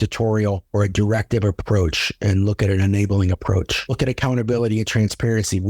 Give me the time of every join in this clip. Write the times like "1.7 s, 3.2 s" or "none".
3.9 s